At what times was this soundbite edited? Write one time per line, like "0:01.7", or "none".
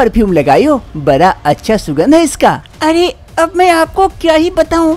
0:02.6